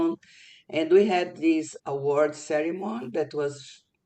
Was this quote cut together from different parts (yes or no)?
yes